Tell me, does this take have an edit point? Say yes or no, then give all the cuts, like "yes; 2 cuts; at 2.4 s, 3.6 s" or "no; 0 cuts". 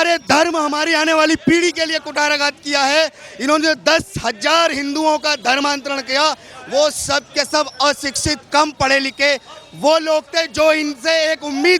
no; 0 cuts